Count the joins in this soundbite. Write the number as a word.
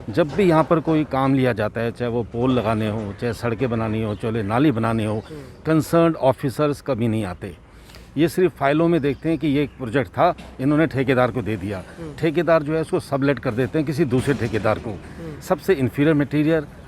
zero